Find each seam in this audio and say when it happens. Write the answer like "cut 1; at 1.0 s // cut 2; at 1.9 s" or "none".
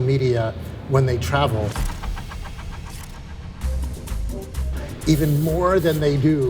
none